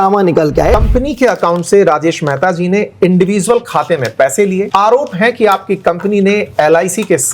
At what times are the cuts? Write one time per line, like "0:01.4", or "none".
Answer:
0:00.8
0:04.7

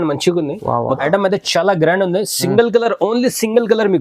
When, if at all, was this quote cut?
0:01.0

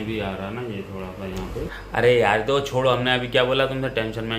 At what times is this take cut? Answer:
0:01.8

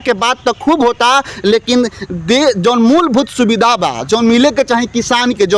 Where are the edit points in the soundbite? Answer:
none

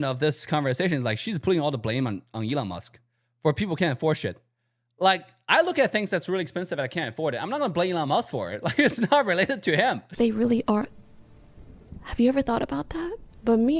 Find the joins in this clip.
0:10.1

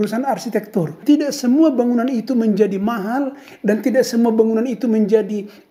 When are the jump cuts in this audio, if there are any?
0:01.0

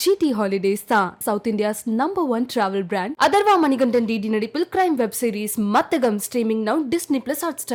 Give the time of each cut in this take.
none

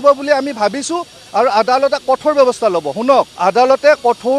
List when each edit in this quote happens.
0:03.3

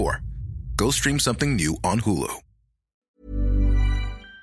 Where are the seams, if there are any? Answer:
0:03.1

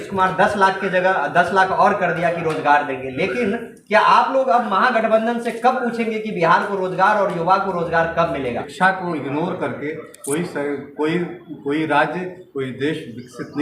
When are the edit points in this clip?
0:08.7

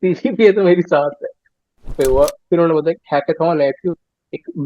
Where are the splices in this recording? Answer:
0:01.9

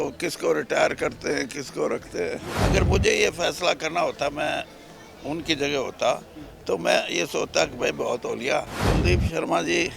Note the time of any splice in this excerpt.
0:02.5
0:08.8

